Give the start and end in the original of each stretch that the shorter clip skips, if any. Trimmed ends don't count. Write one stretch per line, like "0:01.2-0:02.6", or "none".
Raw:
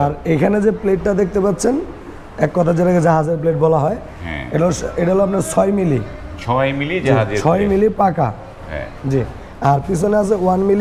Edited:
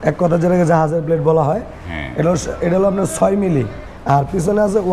0:06.2-0:09.4